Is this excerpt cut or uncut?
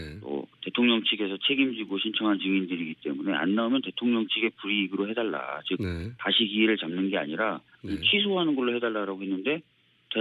uncut